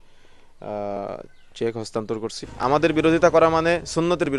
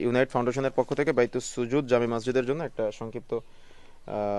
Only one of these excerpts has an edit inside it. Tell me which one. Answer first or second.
first